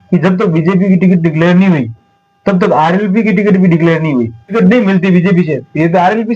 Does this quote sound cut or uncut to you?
cut